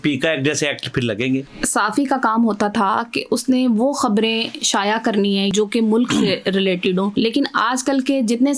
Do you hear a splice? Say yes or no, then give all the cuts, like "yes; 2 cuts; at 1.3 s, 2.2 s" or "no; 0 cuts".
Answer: yes; 3 cuts; at 1.6 s, 5.5 s, 7.1 s